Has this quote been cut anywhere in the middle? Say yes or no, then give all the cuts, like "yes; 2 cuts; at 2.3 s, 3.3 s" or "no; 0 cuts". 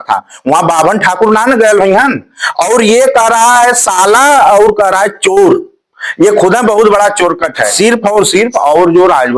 yes; 1 cut; at 7.7 s